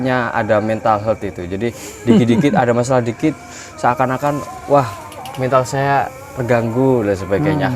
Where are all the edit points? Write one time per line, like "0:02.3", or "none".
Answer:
none